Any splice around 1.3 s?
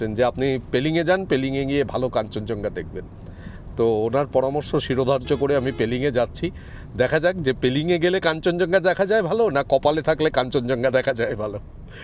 no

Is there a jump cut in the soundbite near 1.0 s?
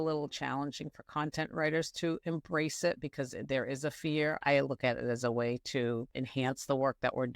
no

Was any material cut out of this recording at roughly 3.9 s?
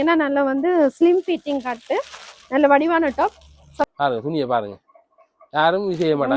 yes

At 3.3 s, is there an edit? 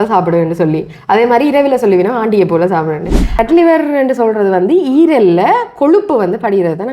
yes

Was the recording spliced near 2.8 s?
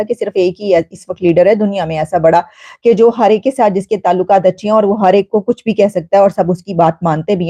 no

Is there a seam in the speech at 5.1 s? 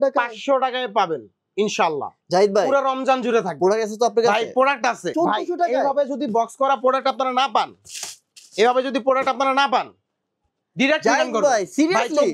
yes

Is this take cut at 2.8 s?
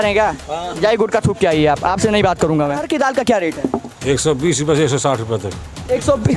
yes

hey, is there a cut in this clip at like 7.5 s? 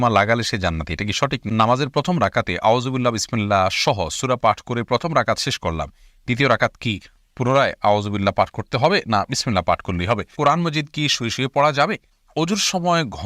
no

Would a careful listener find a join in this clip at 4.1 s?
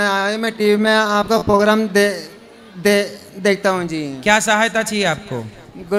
no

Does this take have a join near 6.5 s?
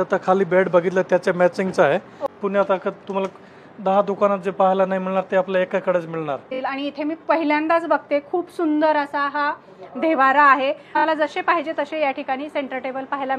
yes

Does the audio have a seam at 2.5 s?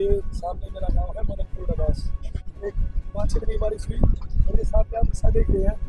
yes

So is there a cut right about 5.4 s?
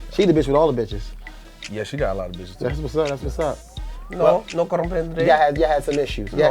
no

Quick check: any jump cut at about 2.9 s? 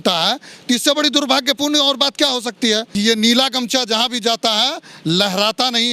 yes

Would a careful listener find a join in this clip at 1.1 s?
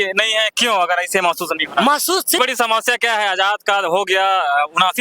no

